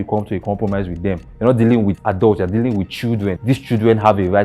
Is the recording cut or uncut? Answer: cut